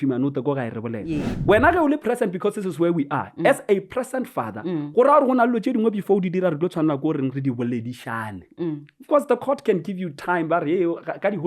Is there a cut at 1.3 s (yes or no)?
yes